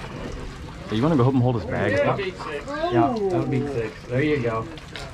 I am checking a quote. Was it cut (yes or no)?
no